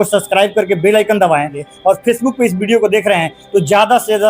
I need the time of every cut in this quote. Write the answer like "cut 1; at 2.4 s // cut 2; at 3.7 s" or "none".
cut 1; at 1.6 s